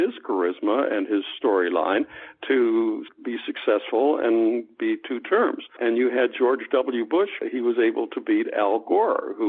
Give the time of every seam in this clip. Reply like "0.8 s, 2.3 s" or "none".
3.1 s, 5.8 s, 7.4 s